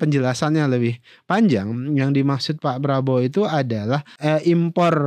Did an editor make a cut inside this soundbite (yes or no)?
yes